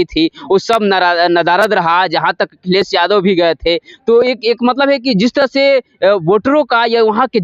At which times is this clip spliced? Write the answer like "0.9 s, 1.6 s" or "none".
none